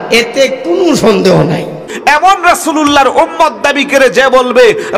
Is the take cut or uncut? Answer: cut